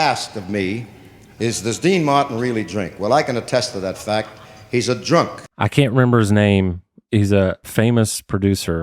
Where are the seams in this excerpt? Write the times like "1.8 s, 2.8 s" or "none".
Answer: 5.4 s, 7.6 s